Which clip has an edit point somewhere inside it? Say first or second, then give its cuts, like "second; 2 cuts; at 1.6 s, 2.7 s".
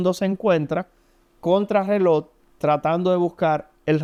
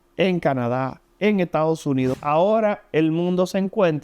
second; 1 cut; at 2.1 s